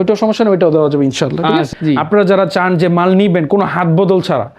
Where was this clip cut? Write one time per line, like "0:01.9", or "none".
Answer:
0:01.7